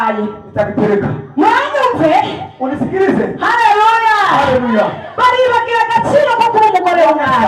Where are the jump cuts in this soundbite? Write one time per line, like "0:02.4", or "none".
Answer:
none